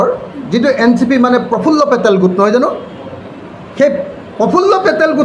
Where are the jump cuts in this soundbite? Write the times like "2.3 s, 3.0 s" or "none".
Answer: none